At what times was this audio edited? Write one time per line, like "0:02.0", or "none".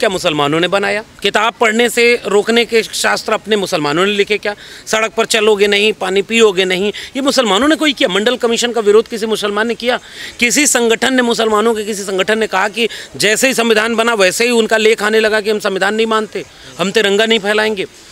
0:01.1